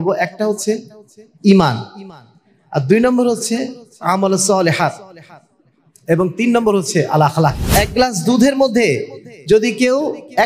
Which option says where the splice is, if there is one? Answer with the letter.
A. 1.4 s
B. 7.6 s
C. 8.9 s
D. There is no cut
B